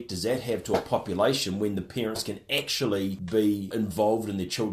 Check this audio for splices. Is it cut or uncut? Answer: cut